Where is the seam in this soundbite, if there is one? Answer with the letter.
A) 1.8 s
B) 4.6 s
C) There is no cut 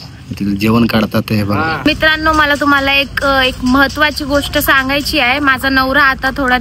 A